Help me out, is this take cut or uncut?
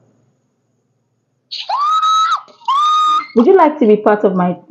cut